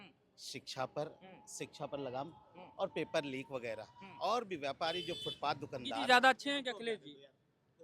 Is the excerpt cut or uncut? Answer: cut